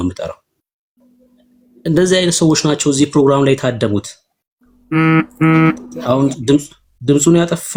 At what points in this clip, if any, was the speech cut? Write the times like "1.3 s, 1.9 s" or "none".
none